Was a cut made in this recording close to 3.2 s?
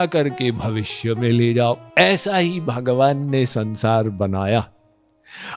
no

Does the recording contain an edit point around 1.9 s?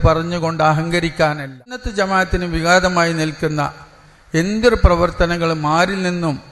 yes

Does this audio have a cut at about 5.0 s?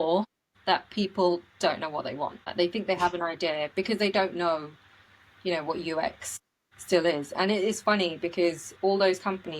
no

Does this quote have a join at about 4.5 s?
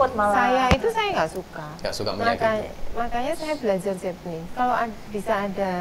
yes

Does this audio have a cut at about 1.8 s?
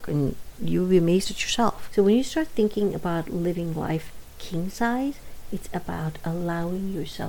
yes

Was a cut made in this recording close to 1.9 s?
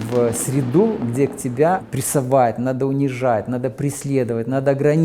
yes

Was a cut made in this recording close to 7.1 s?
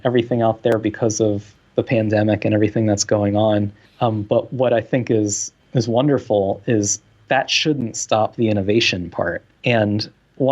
no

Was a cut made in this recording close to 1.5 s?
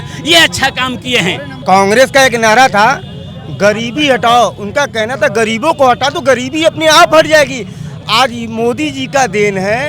yes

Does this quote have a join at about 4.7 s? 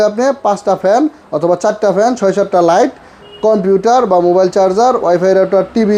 no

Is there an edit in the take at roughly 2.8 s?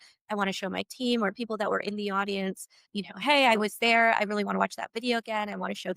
yes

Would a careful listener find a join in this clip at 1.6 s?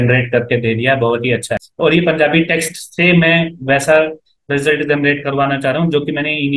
yes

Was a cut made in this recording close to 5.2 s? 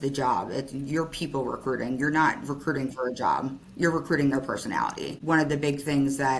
yes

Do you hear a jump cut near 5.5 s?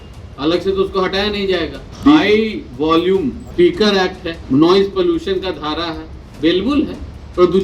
no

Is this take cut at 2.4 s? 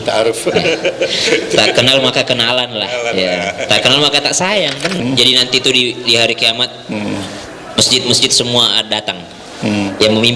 no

